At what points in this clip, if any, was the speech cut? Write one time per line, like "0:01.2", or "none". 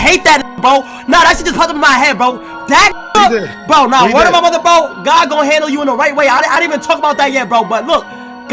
none